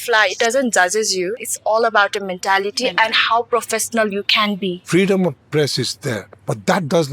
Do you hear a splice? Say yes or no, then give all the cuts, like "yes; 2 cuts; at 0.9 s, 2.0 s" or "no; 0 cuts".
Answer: yes; 2 cuts; at 1.4 s, 4.8 s